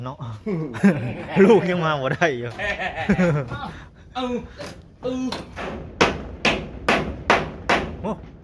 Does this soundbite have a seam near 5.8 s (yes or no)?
yes